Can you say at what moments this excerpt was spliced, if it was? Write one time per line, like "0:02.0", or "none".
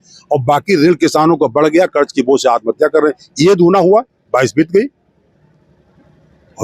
none

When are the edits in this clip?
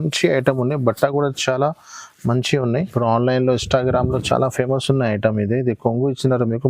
0:02.8

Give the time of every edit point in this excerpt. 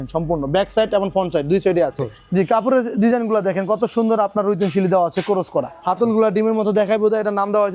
0:02.1
0:05.7

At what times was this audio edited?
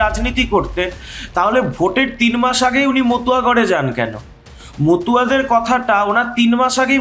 none

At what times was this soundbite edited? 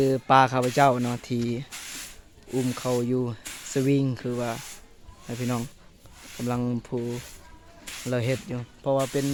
none

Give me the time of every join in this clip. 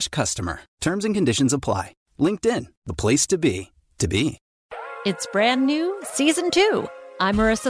0:04.5

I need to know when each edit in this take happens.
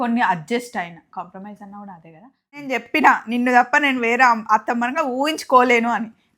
0:02.8

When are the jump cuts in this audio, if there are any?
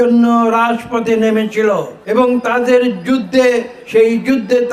none

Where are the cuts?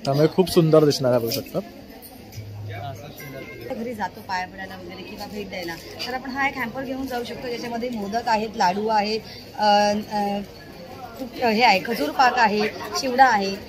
0:03.7

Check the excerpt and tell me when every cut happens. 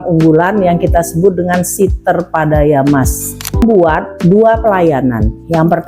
0:03.6

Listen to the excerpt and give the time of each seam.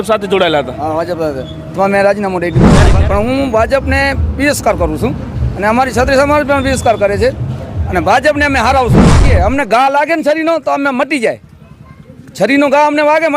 0:02.9
0:09.2

